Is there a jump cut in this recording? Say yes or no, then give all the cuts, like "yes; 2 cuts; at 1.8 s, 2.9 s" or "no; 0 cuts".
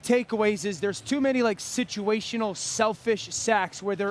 no; 0 cuts